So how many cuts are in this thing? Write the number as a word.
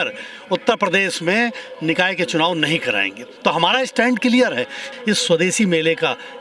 one